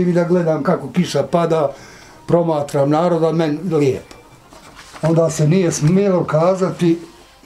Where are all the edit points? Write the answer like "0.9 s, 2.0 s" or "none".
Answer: 4.4 s